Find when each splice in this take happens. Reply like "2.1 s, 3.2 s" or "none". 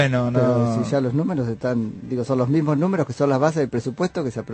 2.0 s